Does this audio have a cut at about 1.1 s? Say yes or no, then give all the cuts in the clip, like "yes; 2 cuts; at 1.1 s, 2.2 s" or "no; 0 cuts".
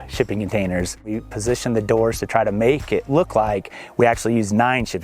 yes; 1 cut; at 1.1 s